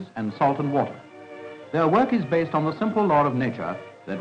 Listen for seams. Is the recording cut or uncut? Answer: uncut